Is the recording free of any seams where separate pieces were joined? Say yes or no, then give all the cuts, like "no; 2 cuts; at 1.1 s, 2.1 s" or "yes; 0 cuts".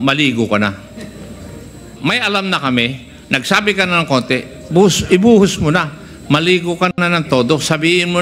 no; 1 cut; at 1.9 s